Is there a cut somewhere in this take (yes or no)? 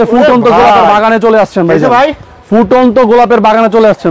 no